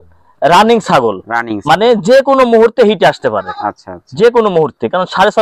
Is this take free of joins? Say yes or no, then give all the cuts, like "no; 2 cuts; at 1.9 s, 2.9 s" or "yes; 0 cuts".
yes; 0 cuts